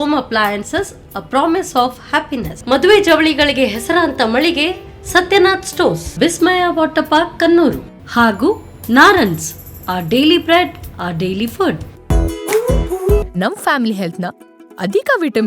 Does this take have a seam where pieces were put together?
yes; 1 cut; at 11.9 s

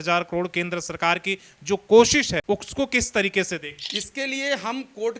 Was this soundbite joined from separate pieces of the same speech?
yes; 2 cuts; at 2.4 s, 3.8 s

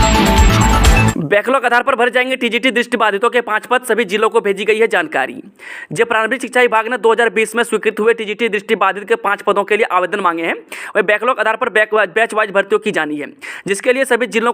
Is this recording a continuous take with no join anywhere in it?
no; 1 cut; at 1.2 s

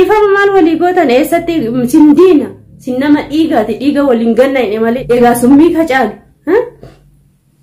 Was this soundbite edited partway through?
yes; 1 cut; at 5.0 s

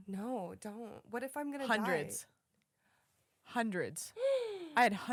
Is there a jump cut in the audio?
no; 0 cuts

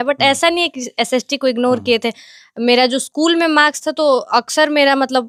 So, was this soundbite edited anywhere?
no; 0 cuts

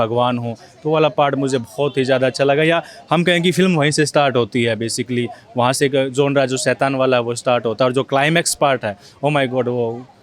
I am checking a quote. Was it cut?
no; 0 cuts

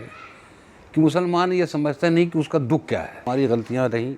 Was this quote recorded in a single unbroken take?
no; 1 cut; at 3.2 s

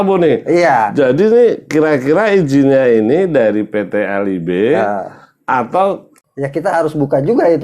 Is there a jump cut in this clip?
yes; 1 cut; at 6.2 s

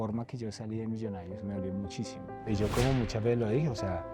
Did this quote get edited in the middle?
yes; 1 cut; at 2.3 s

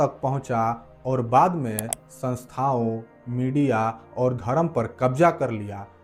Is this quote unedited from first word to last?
yes; 0 cuts

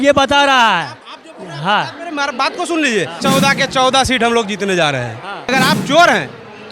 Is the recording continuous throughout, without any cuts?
no; 2 cuts; at 3.2 s, 5.5 s

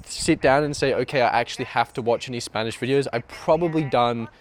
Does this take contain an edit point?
no; 0 cuts

